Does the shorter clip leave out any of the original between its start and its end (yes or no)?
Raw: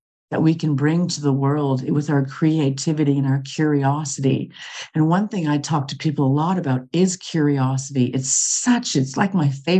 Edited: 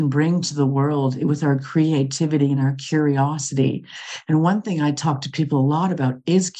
no